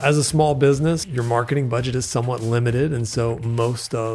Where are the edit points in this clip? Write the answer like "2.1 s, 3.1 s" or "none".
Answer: 1.1 s

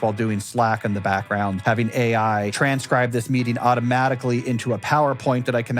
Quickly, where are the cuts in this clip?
1.6 s, 2.5 s

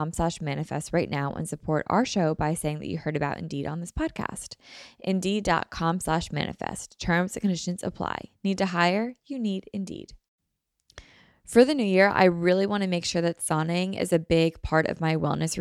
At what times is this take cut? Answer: 10.2 s

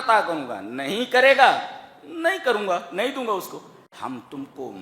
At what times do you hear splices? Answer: 3.9 s

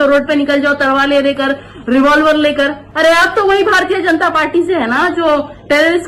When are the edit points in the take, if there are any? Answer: 2.8 s

